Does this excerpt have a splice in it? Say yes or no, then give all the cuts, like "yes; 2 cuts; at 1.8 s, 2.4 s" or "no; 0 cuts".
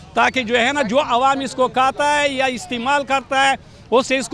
no; 0 cuts